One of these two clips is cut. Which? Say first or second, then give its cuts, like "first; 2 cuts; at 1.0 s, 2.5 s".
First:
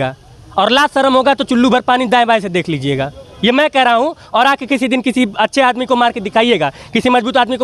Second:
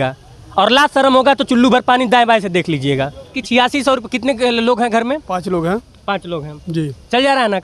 second; 1 cut; at 3.3 s